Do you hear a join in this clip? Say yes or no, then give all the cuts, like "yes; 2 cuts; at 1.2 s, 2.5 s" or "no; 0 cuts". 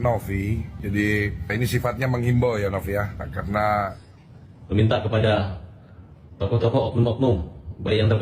yes; 1 cut; at 4.0 s